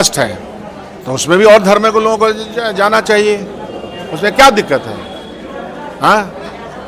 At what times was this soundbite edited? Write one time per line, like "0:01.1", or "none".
none